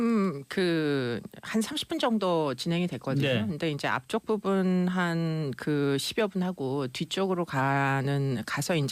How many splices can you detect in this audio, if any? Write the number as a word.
one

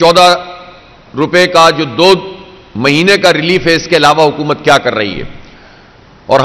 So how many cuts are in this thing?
zero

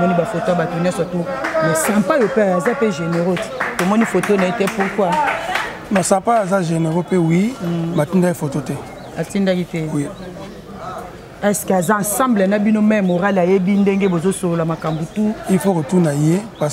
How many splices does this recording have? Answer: zero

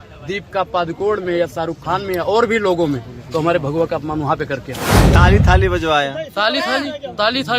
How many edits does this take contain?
one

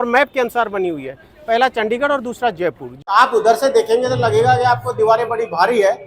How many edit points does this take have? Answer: one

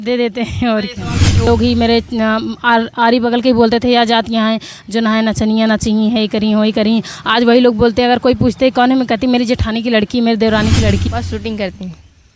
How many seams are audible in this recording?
two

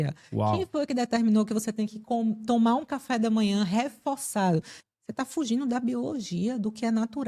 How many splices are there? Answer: one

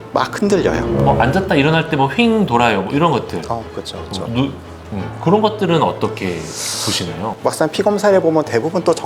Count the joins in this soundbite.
two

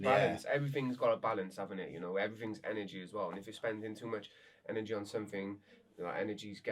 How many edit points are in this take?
zero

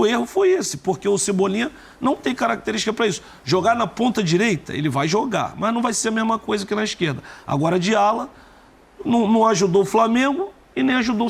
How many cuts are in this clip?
zero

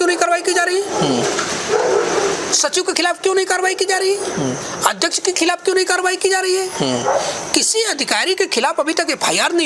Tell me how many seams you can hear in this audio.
zero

